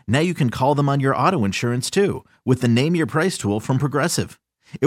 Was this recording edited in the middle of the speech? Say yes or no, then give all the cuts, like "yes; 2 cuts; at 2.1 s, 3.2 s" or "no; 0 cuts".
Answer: no; 0 cuts